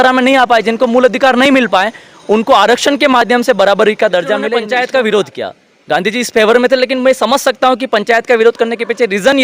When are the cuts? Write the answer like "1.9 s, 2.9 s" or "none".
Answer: 4.6 s